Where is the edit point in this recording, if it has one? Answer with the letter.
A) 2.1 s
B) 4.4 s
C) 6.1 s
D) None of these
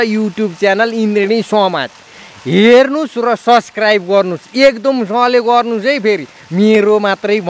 D